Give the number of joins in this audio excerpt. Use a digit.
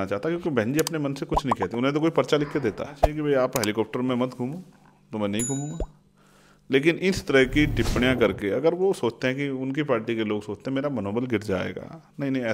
1